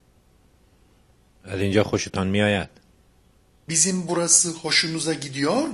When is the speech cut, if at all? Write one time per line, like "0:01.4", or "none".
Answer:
0:01.3